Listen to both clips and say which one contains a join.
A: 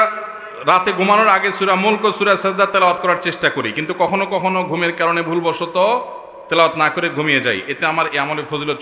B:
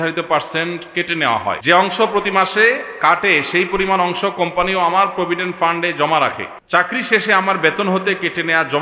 B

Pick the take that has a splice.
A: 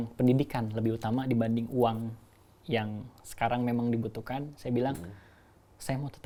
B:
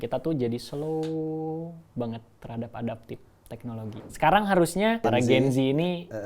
B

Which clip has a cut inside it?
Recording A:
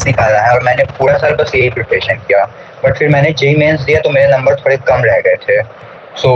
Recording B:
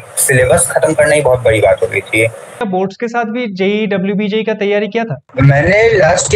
B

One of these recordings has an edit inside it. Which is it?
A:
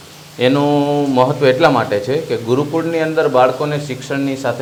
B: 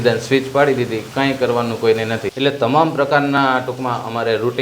B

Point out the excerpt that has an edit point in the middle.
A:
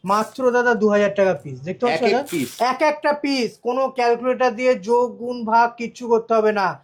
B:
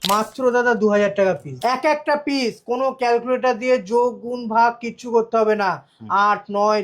B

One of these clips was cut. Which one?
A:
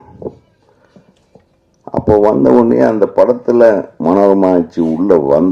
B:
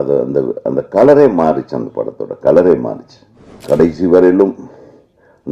B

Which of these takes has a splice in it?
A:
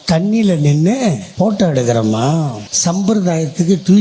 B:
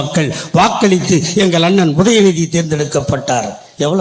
A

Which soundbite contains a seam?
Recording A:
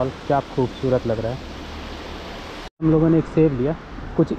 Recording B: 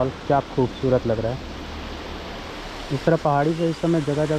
A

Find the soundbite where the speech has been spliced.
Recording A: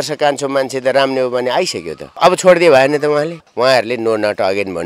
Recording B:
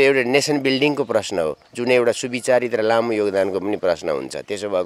A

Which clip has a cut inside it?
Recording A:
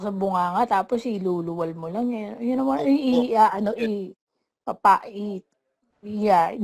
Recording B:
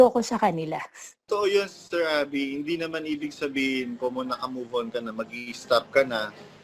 B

